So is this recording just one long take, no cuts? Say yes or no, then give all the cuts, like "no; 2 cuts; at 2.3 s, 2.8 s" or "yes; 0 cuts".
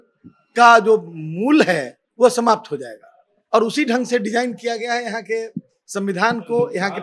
yes; 0 cuts